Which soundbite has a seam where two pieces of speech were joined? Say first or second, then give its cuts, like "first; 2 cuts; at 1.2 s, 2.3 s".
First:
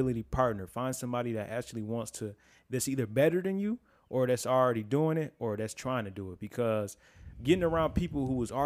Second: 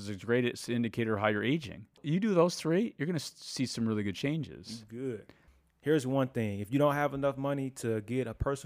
second; 2 cuts; at 2.0 s, 5.4 s